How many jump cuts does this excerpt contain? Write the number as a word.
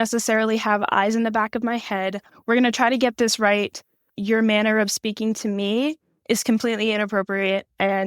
one